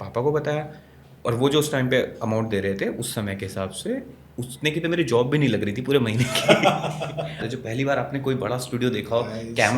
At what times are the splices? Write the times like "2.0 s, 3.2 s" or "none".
7.5 s